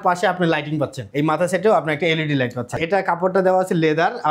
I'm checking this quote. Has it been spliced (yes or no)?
yes